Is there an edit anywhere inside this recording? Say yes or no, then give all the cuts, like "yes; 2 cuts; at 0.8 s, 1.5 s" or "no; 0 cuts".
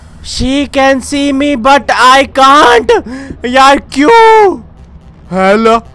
yes; 1 cut; at 4.7 s